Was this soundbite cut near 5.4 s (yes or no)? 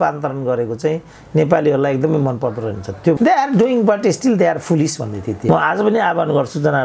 yes